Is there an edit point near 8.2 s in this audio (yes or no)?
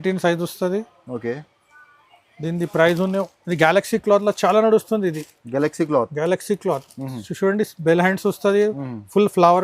no